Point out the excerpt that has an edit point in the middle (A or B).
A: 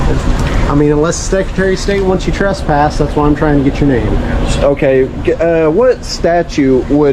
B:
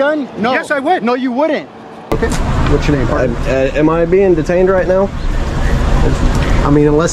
B